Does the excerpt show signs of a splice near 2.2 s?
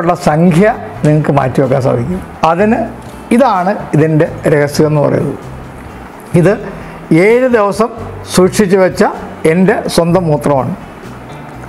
yes; 1 cut; at 2.2 s

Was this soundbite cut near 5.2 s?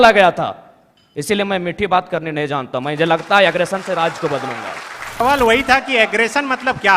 yes; 1 cut; at 5.2 s

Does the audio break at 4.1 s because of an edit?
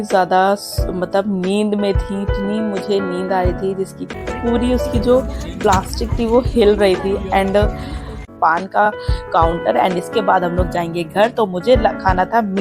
yes; 2 cuts; at 4.1 s, 8.3 s

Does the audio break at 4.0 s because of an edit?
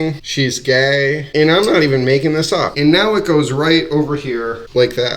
no; 2 cuts; at 1.3 s, 2.7 s

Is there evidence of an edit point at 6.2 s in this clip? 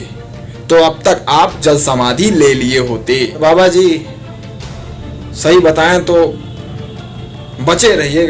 no; 1 cut; at 3.4 s

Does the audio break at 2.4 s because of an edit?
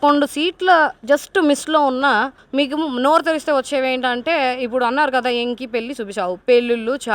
yes; 1 cut; at 2.4 s

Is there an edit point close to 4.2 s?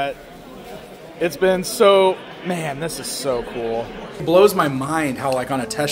yes; 1 cut; at 4.2 s

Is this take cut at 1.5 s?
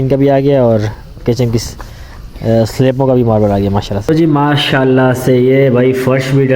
no; 1 cut; at 4.0 s

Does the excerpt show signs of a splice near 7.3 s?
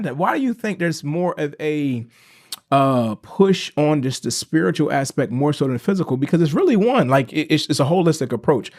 no; 0 cuts

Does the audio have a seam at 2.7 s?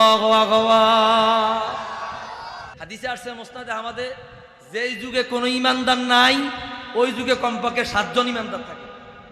yes; 1 cut; at 2.7 s

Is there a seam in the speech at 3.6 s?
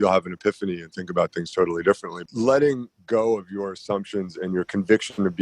no; 1 cut; at 2.1 s

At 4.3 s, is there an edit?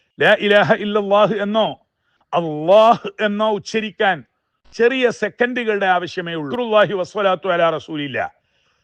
no; 1 cut; at 6.5 s

